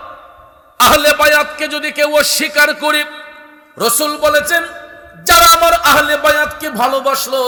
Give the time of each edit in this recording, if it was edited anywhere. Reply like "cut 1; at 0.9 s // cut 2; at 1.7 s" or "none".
none